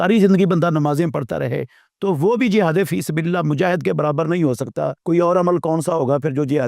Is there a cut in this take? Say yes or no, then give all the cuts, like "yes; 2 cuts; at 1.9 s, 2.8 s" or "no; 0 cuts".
yes; 1 cut; at 5.0 s